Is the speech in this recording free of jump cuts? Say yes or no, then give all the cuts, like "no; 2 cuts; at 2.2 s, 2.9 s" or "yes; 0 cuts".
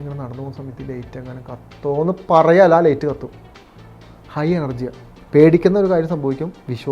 no; 1 cut; at 5.2 s